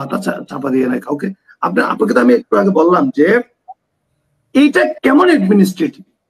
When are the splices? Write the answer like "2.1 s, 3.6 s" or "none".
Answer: none